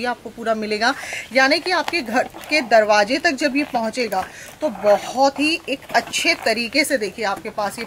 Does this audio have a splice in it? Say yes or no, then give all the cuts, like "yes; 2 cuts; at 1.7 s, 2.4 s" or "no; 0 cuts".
no; 0 cuts